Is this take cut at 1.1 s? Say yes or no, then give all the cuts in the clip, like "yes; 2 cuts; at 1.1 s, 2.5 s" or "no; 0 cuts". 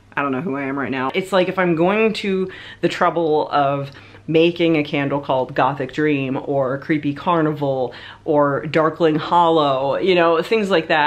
yes; 1 cut; at 1.1 s